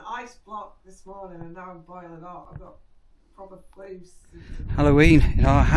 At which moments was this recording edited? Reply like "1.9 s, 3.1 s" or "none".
4.6 s